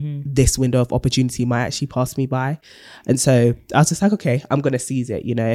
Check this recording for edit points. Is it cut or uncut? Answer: uncut